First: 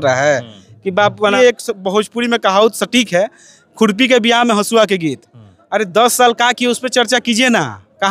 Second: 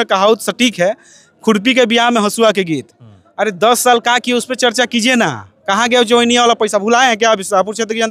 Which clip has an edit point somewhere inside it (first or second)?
first